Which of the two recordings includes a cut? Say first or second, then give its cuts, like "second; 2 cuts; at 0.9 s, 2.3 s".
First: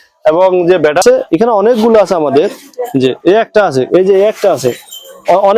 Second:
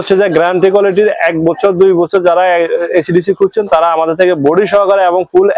first; 1 cut; at 1.0 s